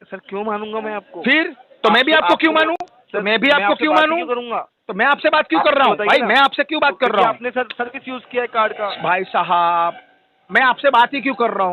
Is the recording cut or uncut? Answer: uncut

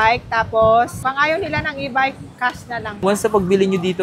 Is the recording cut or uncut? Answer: cut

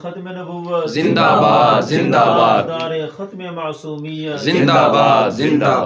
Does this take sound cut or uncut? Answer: uncut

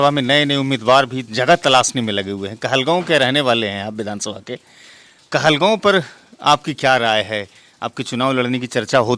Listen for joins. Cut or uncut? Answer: uncut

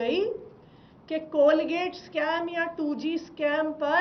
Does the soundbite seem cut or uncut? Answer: uncut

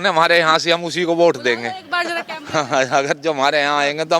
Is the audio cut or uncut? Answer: uncut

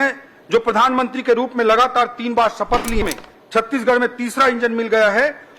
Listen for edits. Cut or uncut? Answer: cut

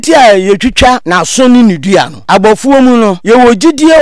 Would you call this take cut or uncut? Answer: cut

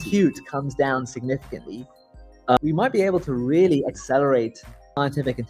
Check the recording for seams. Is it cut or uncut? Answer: uncut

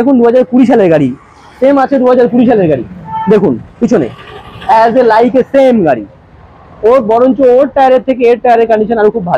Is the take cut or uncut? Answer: uncut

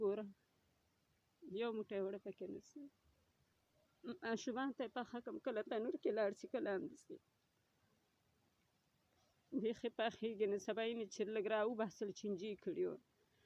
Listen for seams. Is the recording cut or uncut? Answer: cut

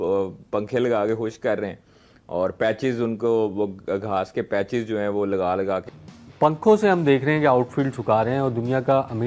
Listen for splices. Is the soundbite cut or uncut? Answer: cut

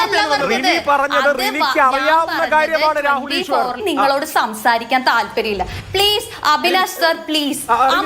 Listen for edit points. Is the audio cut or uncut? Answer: cut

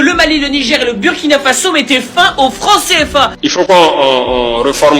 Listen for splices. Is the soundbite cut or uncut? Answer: cut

